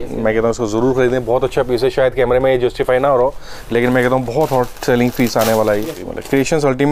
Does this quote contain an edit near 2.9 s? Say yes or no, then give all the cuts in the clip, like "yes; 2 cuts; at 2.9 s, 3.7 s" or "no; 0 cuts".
no; 1 cut; at 5.9 s